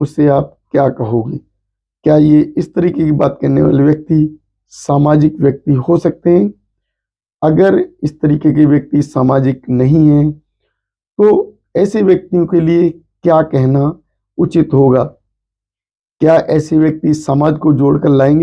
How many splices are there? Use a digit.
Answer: 0